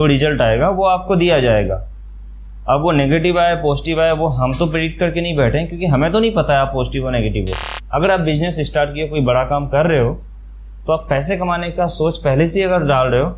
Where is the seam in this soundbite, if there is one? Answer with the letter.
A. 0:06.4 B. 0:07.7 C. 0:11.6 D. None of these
B